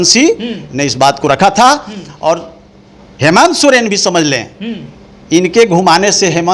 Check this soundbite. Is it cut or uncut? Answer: uncut